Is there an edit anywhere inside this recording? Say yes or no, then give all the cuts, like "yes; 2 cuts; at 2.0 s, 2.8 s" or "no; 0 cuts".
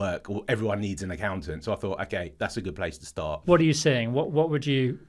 yes; 1 cut; at 3.4 s